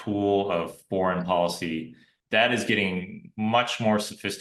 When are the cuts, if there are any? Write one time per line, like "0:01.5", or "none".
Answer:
0:02.1